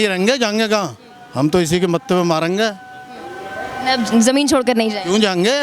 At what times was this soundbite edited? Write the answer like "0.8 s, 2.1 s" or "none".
none